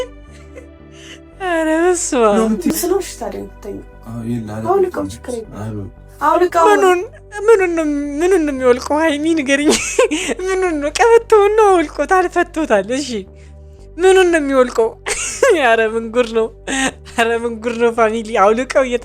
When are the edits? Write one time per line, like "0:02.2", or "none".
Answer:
0:02.7